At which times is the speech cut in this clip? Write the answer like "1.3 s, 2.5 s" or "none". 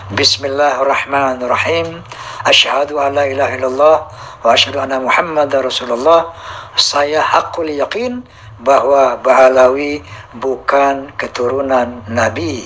none